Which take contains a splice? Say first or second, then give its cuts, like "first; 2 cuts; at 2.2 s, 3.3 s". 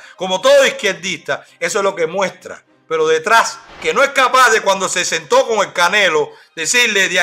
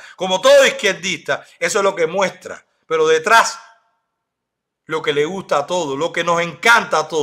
first; 1 cut; at 3.7 s